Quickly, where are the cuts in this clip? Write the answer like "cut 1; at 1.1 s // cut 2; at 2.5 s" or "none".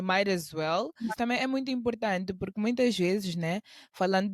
cut 1; at 1.1 s